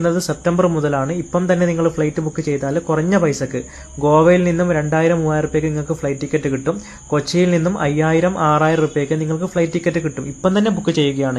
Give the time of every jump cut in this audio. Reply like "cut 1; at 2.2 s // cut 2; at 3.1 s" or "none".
cut 1; at 5.6 s